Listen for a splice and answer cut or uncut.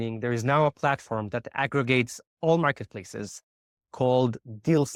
uncut